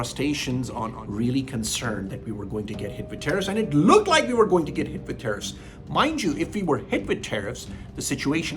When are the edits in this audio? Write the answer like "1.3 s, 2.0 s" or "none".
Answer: 1.0 s